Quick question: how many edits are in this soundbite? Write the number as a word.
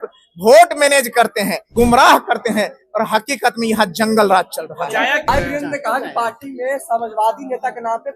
two